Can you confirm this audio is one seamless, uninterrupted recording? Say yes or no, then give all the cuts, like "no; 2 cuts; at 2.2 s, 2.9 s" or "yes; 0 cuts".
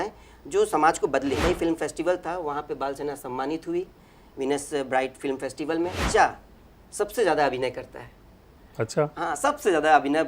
no; 2 cuts; at 1.4 s, 5.9 s